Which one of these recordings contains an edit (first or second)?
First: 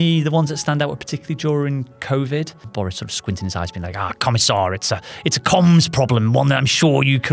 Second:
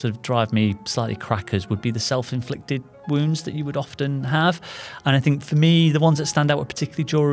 first